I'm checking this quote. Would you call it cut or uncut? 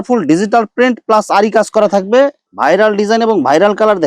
cut